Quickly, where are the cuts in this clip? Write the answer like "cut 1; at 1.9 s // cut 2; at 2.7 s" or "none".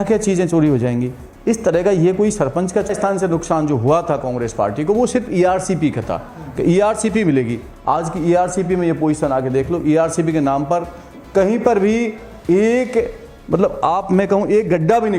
cut 1; at 2.9 s